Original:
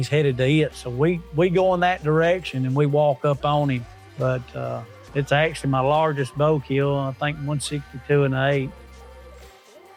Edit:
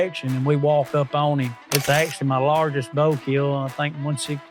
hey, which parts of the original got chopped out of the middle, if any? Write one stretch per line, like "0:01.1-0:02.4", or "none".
0:03.9-0:05.0